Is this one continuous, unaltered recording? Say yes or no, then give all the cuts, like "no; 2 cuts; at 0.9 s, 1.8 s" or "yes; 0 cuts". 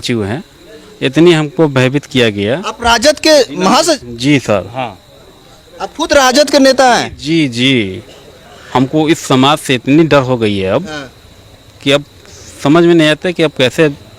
yes; 0 cuts